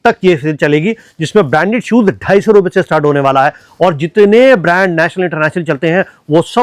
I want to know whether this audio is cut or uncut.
uncut